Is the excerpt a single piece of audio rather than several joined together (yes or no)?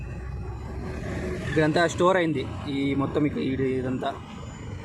yes